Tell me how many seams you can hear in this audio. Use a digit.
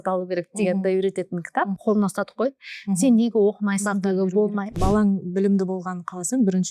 2